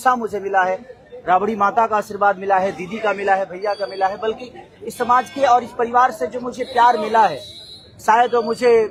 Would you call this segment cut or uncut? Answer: uncut